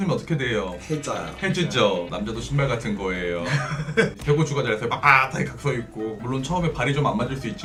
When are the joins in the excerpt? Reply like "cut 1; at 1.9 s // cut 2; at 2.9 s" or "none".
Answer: none